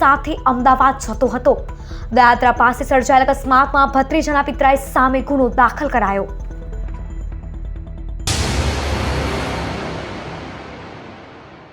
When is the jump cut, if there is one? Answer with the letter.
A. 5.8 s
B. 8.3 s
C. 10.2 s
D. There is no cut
B